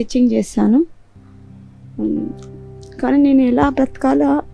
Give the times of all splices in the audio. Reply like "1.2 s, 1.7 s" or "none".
none